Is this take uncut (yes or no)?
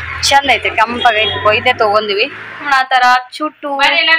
no